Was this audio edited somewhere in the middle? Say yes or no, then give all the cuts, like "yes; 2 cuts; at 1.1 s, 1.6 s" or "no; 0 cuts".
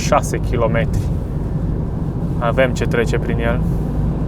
no; 0 cuts